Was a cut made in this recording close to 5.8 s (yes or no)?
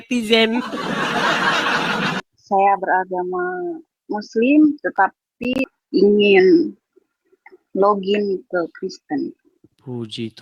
yes